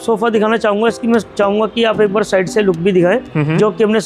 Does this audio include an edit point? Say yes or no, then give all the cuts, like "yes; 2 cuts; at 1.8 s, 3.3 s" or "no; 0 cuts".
no; 0 cuts